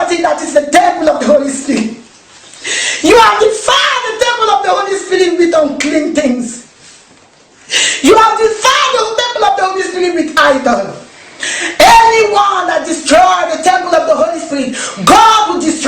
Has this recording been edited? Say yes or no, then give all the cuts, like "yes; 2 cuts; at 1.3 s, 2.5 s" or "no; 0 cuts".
yes; 1 cut; at 4.8 s